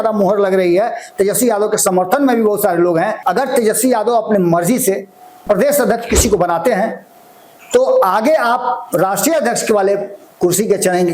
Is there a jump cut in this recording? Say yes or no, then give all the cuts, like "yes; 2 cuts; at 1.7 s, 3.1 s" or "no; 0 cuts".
yes; 1 cut; at 3.2 s